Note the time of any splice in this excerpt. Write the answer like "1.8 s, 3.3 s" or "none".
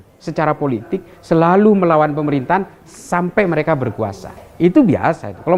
none